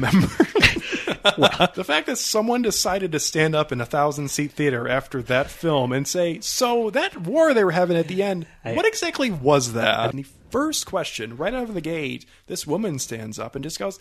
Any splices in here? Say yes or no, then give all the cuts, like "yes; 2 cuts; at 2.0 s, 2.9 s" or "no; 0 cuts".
yes; 3 cuts; at 1.7 s, 7.2 s, 10.1 s